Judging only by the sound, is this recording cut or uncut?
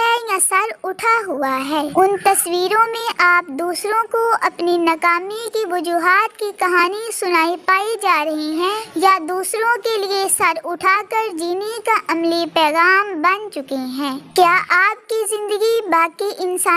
cut